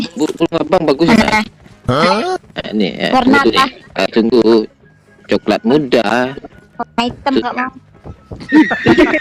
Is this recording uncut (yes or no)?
no